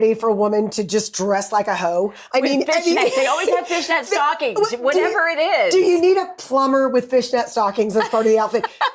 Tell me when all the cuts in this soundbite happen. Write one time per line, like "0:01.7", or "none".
none